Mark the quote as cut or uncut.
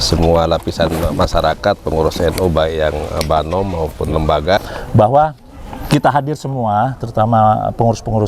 cut